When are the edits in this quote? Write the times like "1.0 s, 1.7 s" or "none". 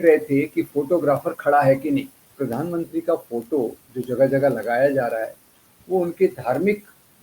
2.3 s

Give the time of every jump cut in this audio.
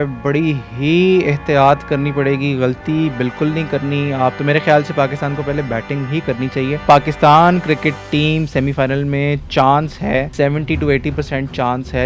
4.4 s, 6.8 s, 10.3 s

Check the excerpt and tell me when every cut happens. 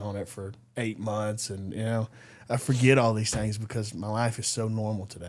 none

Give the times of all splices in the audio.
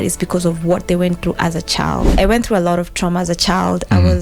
2.1 s

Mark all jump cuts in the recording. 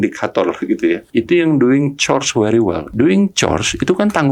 1.0 s, 2.9 s

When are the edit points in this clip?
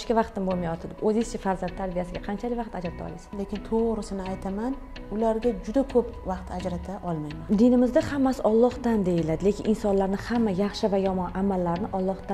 3.3 s, 7.4 s

